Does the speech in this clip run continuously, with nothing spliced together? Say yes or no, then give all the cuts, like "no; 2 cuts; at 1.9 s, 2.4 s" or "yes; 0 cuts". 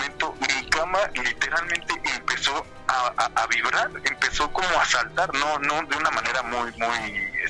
yes; 0 cuts